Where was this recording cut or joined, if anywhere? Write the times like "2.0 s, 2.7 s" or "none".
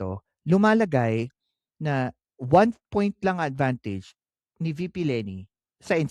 none